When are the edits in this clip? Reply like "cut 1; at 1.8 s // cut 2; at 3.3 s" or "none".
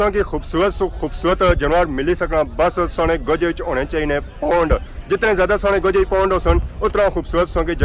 none